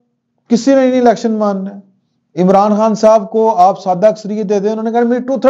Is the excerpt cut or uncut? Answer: uncut